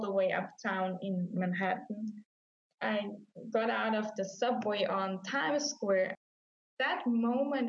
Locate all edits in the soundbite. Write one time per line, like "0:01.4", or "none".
0:06.2